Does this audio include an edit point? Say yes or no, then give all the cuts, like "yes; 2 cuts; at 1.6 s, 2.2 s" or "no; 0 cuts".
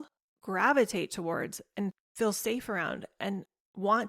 yes; 1 cut; at 2.0 s